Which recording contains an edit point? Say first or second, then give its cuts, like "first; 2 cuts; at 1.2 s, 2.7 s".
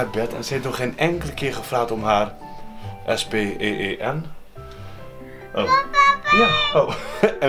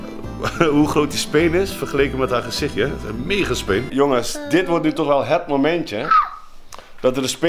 second; 1 cut; at 3.9 s